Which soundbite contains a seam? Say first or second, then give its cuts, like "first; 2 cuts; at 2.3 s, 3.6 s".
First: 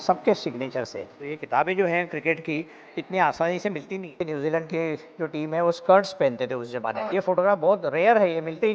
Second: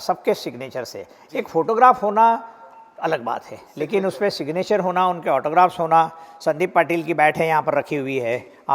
first; 3 cuts; at 1.3 s, 4.2 s, 7.1 s